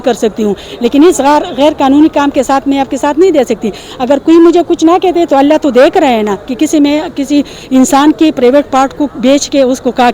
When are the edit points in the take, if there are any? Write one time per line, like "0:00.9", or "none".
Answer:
none

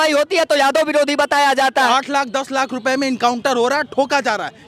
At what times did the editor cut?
0:01.9

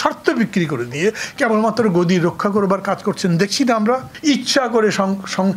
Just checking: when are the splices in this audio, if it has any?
0:04.1

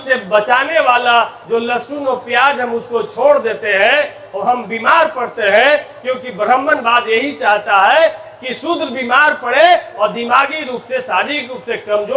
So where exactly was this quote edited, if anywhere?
none

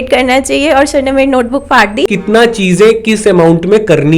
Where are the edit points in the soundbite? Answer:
0:02.1

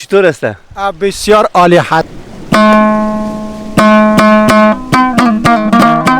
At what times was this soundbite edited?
0:02.1

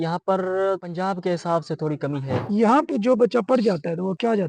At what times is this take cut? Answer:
0:02.4

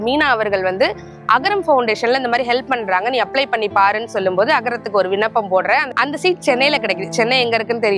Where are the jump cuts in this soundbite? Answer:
0:05.9

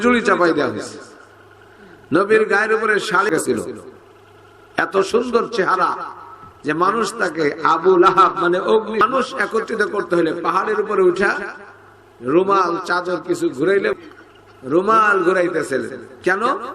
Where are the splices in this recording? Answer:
0:03.3
0:09.0
0:13.9

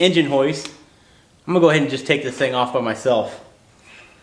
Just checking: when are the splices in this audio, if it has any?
none

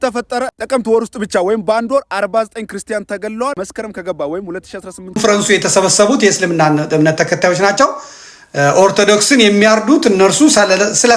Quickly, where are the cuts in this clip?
0:05.0

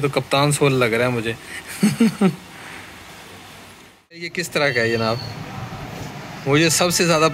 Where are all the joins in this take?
0:04.4

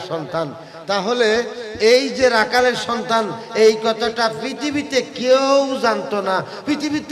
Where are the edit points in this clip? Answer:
none

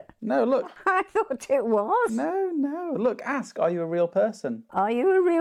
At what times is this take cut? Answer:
none

